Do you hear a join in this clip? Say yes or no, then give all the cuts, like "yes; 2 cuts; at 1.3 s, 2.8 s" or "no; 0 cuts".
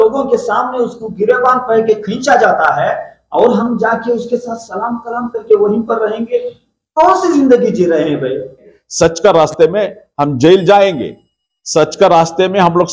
yes; 1 cut; at 8.7 s